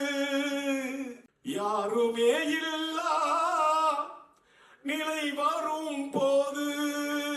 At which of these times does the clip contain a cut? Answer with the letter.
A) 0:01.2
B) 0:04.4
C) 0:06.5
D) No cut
A